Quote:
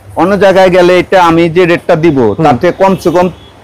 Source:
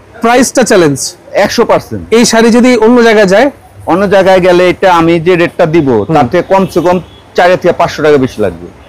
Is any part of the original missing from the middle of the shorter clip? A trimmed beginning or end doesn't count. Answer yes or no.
no